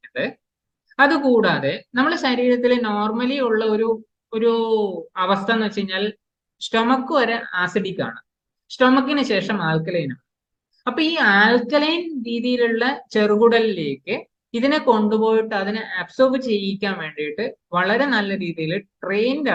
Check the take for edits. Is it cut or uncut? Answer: uncut